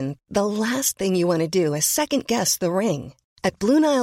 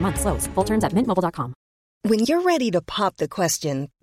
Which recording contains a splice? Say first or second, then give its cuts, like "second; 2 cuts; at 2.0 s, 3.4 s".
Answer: second; 1 cut; at 1.8 s